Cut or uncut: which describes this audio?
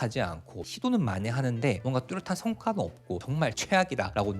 cut